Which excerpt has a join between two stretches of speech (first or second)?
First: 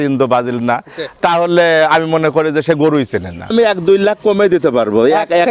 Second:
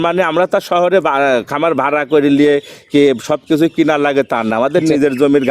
first